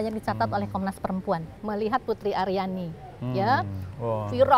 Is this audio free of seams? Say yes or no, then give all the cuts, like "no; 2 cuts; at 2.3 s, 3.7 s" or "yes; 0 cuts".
no; 1 cut; at 1.5 s